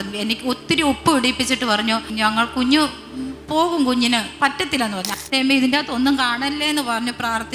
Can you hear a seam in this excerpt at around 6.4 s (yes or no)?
no